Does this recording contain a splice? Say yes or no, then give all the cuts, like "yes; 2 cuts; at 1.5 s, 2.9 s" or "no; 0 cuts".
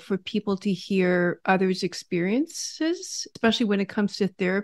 yes; 1 cut; at 3.2 s